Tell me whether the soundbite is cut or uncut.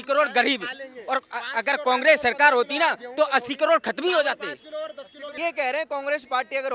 uncut